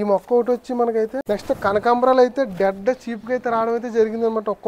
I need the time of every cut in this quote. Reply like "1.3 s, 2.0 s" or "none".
1.2 s